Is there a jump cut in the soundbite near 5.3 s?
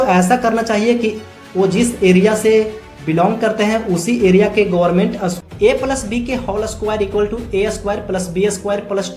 yes; 1 cut; at 5.3 s

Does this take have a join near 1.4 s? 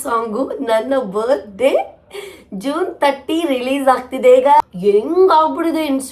no; 1 cut; at 4.6 s

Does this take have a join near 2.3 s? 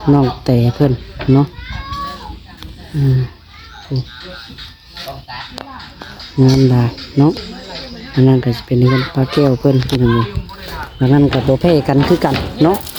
no; 0 cuts

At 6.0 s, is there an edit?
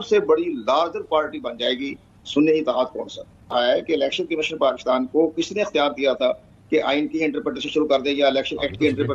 no; 1 cut; at 3.5 s

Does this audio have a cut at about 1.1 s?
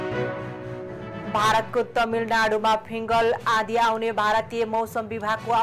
yes; 1 cut; at 1.1 s

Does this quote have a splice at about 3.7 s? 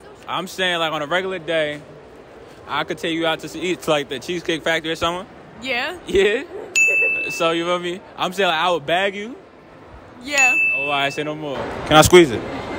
no; 1 cut; at 11.6 s

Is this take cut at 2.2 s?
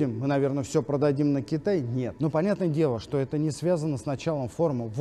yes; 1 cut; at 2.2 s

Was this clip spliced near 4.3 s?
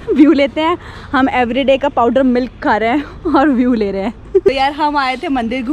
yes; 1 cut; at 4.3 s

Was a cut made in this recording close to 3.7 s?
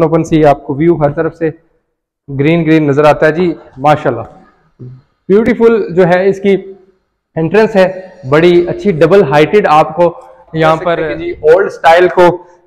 yes; 2 cuts; at 3.7 s, 10.9 s

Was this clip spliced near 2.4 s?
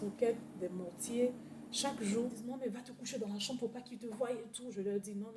yes; 1 cut; at 2.4 s

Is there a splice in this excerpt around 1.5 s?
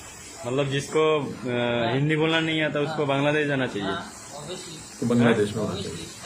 no; 1 cut; at 5.0 s

